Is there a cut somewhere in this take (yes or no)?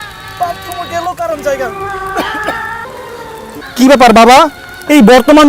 yes